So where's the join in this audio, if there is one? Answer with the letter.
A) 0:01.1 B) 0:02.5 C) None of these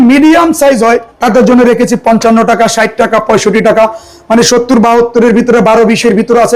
A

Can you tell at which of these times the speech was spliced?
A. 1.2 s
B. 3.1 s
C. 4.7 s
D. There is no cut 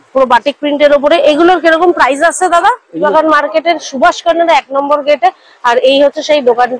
B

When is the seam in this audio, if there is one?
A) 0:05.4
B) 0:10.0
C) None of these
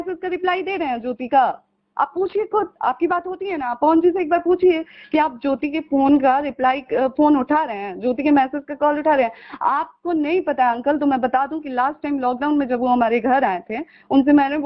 C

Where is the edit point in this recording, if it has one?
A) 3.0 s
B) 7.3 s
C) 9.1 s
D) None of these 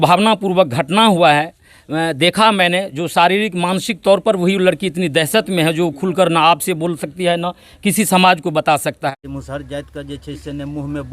C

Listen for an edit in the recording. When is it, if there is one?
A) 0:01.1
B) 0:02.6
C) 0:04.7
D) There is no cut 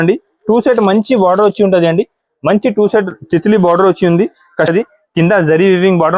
C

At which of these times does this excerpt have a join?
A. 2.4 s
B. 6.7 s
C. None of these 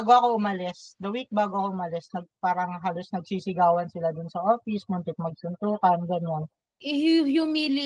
B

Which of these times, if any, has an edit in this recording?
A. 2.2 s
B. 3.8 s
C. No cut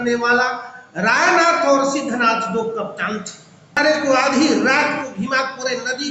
B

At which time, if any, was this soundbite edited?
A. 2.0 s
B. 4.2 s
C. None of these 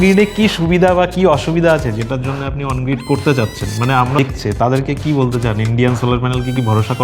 B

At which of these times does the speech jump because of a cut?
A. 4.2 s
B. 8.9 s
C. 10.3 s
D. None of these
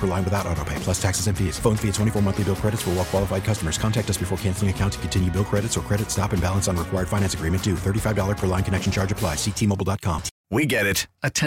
C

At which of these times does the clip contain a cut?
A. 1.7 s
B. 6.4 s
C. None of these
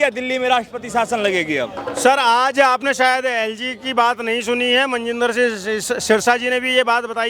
C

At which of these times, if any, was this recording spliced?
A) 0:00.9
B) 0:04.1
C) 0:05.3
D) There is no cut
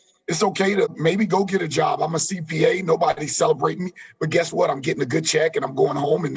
A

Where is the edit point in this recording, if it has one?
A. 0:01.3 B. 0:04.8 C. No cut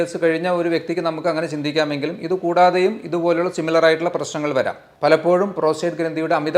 B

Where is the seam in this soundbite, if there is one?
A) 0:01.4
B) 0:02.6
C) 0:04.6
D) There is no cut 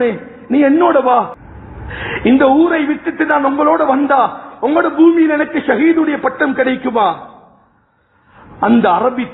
A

